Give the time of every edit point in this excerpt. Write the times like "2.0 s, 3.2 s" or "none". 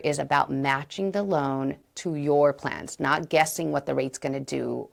none